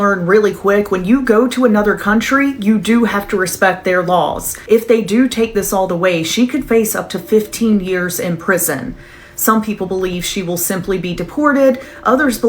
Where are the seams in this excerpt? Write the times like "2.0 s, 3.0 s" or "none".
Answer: 4.5 s